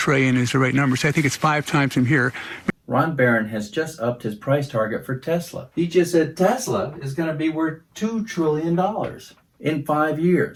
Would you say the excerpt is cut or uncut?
uncut